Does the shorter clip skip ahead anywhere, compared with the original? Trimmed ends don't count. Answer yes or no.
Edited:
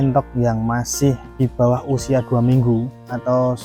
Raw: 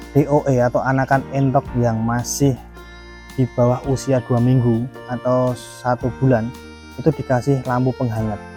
yes